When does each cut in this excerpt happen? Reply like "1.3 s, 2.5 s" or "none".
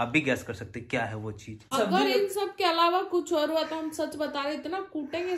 1.7 s